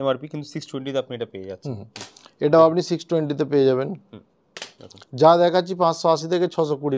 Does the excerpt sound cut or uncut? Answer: uncut